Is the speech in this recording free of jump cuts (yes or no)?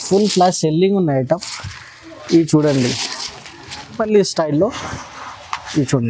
no